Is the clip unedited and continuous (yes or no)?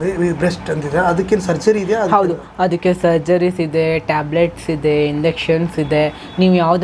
yes